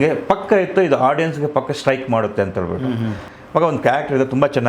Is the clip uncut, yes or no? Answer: no